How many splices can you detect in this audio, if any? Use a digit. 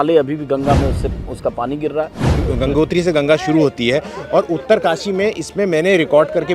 1